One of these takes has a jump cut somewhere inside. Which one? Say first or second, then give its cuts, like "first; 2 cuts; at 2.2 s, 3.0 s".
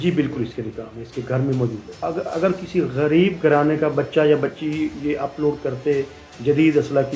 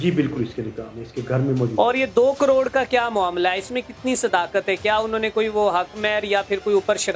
first; 1 cut; at 1.8 s